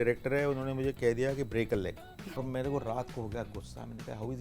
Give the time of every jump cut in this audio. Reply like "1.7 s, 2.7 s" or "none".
2.5 s